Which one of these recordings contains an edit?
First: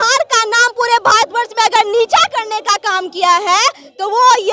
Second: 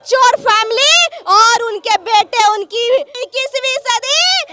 second; 1 cut; at 3.2 s

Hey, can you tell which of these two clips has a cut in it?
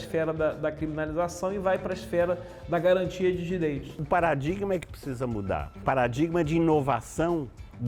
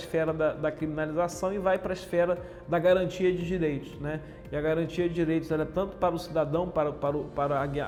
first; 2 cuts; at 4.0 s, 5.8 s

